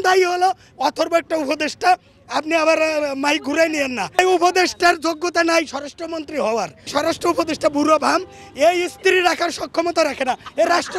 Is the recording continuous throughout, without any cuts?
no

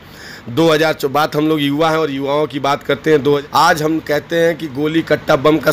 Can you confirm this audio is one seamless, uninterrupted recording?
no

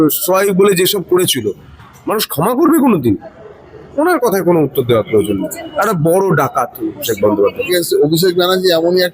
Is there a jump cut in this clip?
yes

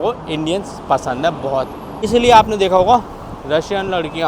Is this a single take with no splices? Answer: no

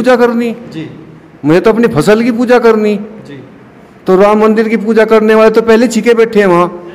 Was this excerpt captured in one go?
yes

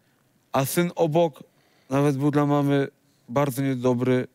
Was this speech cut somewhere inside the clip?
no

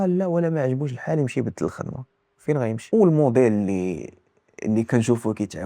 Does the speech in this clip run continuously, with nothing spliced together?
no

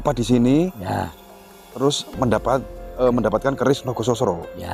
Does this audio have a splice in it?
no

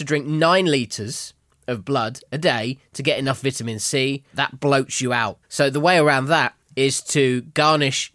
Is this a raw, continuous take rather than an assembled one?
no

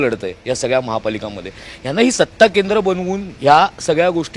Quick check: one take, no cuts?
yes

